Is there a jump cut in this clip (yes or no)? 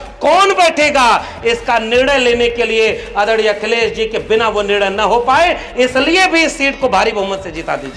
no